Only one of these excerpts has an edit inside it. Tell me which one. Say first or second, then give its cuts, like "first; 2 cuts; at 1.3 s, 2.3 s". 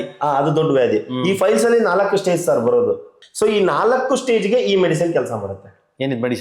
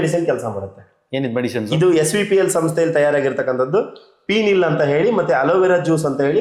first; 1 cut; at 3.1 s